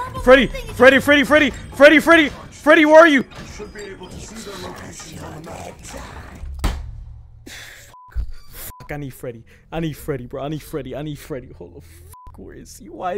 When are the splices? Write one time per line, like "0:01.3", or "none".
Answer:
none